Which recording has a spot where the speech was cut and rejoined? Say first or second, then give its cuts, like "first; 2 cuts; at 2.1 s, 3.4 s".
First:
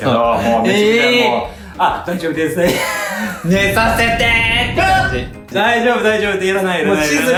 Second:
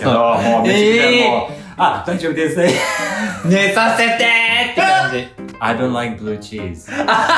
second; 1 cut; at 5.4 s